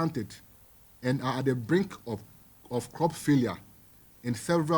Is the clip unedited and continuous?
yes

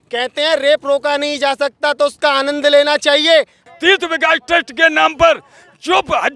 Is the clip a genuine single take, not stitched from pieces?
no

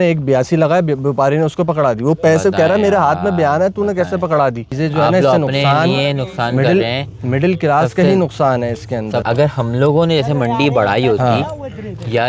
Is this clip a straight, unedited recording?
no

